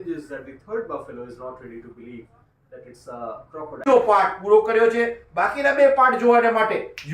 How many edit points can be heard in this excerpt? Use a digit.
1